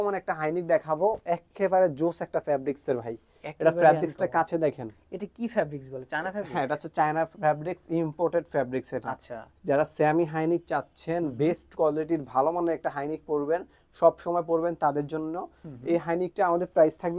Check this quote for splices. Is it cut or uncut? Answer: uncut